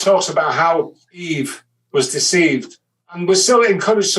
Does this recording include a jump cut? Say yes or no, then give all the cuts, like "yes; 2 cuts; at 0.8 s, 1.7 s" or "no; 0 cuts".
yes; 2 cuts; at 1.2 s, 3.1 s